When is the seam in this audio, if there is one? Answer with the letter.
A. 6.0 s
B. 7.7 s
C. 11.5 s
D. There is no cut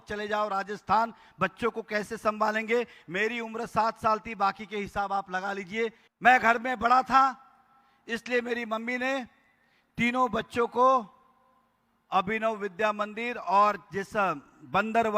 A